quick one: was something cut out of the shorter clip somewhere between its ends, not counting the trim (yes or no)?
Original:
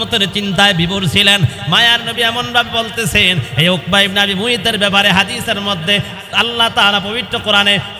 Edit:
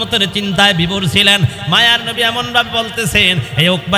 no